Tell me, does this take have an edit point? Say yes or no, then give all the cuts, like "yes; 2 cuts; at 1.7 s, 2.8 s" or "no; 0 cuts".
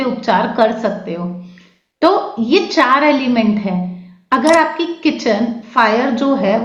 no; 0 cuts